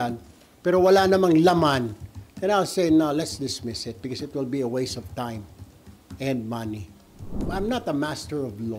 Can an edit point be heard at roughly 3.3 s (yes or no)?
no